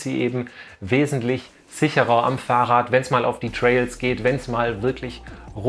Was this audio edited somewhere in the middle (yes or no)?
no